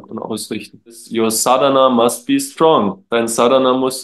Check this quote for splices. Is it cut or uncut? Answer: cut